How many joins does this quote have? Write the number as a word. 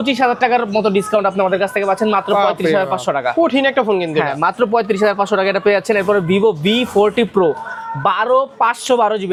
zero